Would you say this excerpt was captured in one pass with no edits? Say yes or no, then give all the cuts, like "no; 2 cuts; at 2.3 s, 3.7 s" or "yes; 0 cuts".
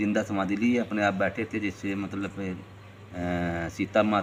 yes; 0 cuts